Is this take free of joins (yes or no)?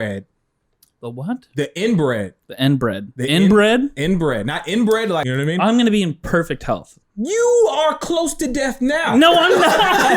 no